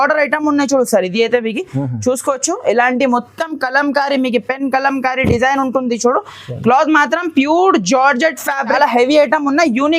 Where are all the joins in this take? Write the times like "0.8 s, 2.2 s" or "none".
8.7 s